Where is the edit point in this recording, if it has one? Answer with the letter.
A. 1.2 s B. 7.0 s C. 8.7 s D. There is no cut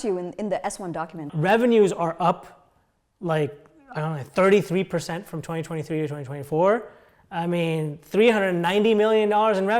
A